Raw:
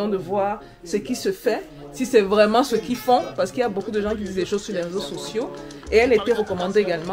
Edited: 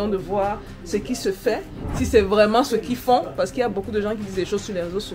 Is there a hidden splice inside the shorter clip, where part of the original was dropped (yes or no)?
no